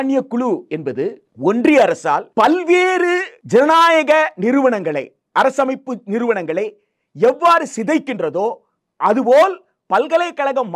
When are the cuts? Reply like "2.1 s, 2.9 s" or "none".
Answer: 1.3 s, 2.3 s, 3.3 s